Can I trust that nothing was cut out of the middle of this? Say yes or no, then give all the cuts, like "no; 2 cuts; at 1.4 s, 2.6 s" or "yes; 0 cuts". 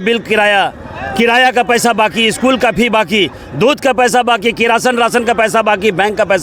yes; 0 cuts